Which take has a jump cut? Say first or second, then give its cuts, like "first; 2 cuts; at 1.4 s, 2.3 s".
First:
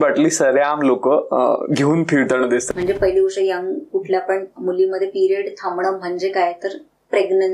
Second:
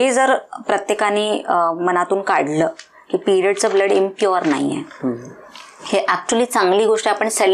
first; 1 cut; at 2.7 s